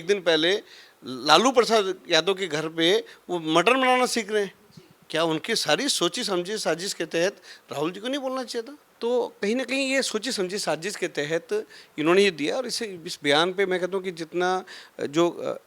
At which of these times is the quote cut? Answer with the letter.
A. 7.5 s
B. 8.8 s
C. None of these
B